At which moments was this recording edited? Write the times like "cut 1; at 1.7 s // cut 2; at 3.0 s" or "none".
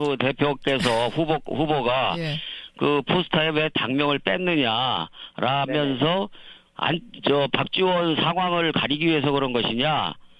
cut 1; at 6.2 s